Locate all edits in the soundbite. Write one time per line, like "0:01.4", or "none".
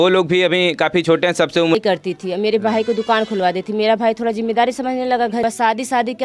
0:01.7
0:05.4